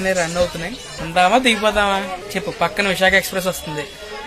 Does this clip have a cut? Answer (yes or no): no